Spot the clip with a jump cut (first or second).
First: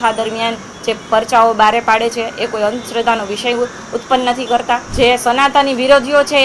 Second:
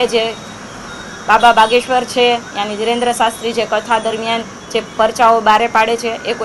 first